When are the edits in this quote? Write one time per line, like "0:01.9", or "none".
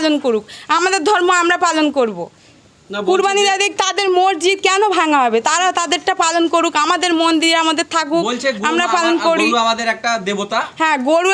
none